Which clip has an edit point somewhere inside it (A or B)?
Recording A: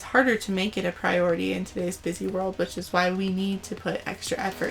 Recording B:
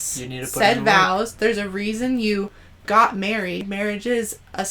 B